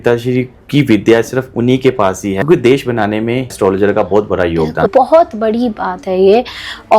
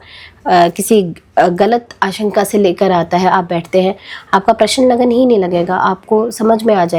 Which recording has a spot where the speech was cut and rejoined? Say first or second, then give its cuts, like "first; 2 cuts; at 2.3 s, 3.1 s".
first; 3 cuts; at 2.4 s, 3.5 s, 4.9 s